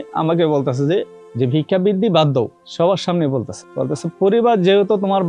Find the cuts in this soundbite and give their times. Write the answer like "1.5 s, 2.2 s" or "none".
1.2 s, 2.6 s, 3.6 s